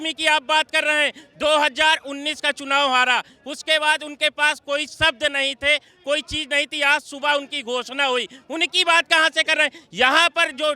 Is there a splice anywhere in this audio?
no; 0 cuts

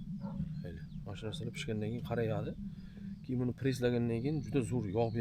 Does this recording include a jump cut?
no; 0 cuts

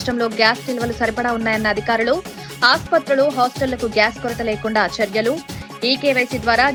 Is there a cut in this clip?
no; 0 cuts

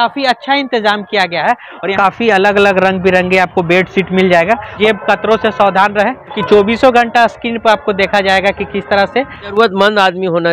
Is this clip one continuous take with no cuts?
no; 4 cuts; at 2.0 s, 4.8 s, 6.4 s, 9.5 s

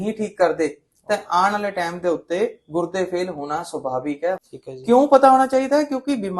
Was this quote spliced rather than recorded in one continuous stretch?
yes; 1 cut; at 4.4 s

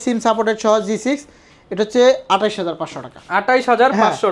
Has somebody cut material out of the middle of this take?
no; 0 cuts

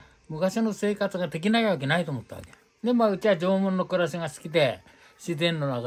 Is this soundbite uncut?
yes; 0 cuts

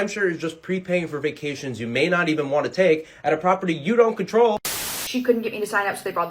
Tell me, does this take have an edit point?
yes; 1 cut; at 4.8 s

